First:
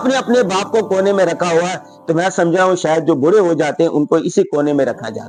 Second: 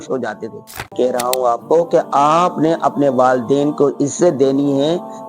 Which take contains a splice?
second; 1 cut; at 0.9 s

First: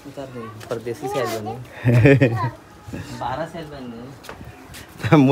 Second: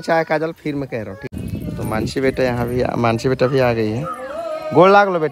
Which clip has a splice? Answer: second; 1 cut; at 1.3 s

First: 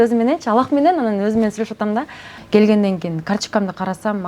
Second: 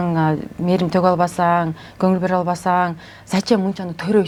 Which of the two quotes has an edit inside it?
first; 1 cut; at 2.3 s

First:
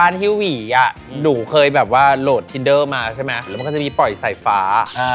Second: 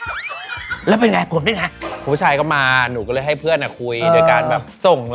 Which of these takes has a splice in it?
first; 1 cut; at 3.5 s

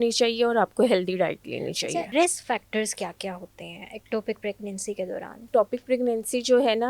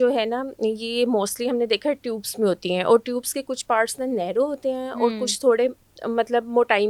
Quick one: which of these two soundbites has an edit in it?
first; 2 cuts; at 2.1 s, 5.5 s

